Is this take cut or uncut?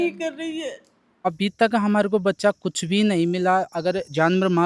cut